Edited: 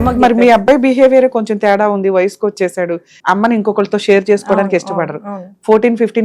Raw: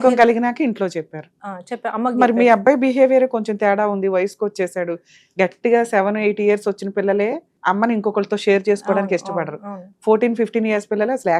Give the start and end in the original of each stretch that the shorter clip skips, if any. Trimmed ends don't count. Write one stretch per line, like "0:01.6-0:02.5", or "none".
0:05.1-0:07.5